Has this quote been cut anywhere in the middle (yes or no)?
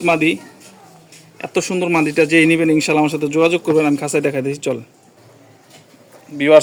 no